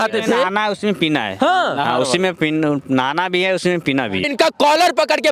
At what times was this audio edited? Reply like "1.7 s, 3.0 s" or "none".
4.2 s